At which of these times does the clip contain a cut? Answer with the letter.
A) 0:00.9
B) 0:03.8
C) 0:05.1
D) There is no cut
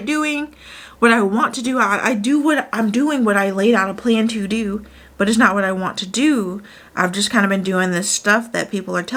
D